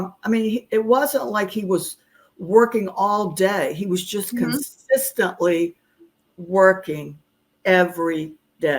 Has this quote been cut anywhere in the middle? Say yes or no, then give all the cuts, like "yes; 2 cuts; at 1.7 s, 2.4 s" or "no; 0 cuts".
no; 0 cuts